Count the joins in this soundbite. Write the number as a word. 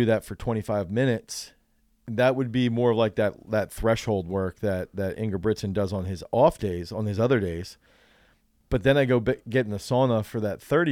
zero